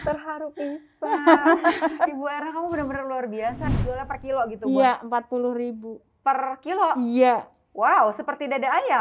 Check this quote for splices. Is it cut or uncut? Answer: cut